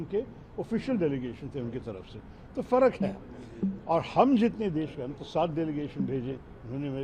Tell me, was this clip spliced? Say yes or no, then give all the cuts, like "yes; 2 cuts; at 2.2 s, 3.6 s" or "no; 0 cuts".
no; 0 cuts